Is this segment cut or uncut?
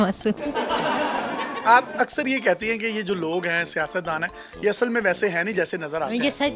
uncut